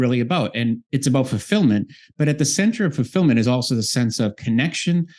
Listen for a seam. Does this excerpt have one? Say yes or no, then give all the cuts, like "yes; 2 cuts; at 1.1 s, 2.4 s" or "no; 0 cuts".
no; 0 cuts